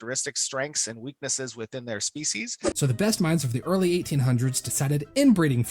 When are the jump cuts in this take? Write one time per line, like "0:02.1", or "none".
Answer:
0:02.8